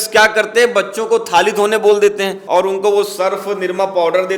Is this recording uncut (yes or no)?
no